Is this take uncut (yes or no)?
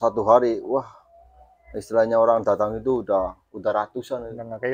yes